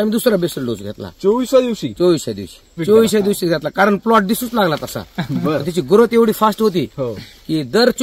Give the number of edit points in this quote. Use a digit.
1